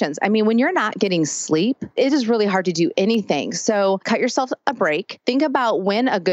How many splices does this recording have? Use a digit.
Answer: 3